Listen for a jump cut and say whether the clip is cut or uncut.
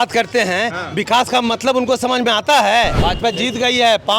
cut